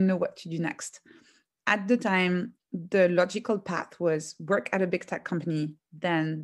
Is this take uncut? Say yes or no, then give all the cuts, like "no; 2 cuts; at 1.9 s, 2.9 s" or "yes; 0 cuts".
yes; 0 cuts